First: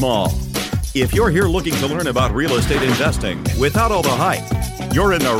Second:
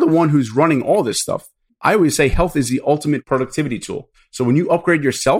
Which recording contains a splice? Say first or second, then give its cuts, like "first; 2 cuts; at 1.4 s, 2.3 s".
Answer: second; 3 cuts; at 1.7 s, 3.2 s, 4.2 s